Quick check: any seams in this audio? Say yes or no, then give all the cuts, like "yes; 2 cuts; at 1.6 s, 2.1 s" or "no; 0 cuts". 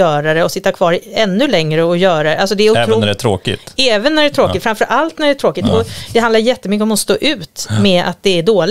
no; 0 cuts